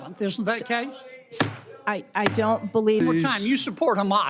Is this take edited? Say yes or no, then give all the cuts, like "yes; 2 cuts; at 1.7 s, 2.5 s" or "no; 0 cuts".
yes; 1 cut; at 3.0 s